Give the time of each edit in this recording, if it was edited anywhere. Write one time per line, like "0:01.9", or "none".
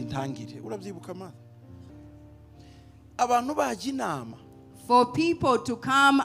0:01.9